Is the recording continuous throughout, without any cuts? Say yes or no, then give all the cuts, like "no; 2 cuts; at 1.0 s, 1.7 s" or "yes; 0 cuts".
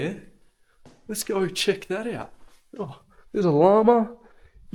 yes; 0 cuts